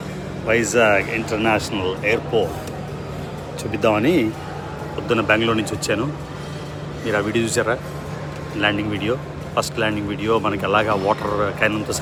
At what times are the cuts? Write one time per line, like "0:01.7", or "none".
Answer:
none

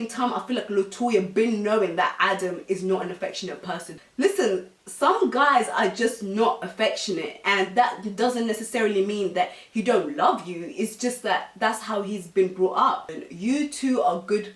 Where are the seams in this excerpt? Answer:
0:03.9
0:13.2

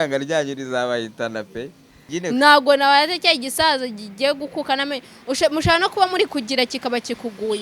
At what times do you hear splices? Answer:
0:02.0

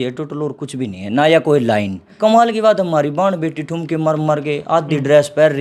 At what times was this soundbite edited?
0:02.1

